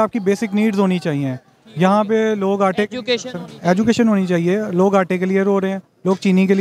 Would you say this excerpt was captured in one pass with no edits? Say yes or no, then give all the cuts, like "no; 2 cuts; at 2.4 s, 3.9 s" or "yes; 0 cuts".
yes; 0 cuts